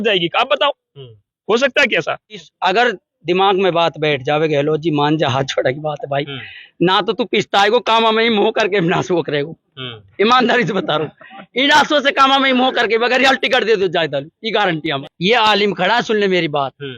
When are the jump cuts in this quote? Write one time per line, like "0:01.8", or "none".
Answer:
0:02.4
0:15.0